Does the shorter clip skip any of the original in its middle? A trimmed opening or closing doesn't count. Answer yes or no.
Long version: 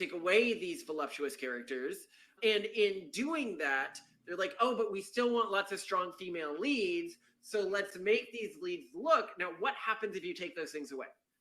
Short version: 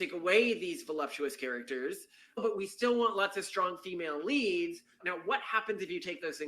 yes